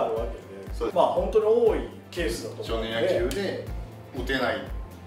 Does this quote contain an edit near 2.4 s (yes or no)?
no